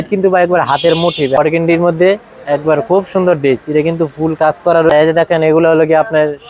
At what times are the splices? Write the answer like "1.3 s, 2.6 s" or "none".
1.4 s, 4.9 s